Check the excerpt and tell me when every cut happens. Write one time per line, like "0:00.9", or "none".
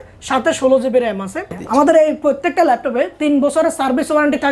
0:01.5